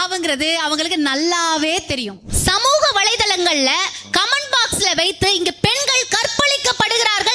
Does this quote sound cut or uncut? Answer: cut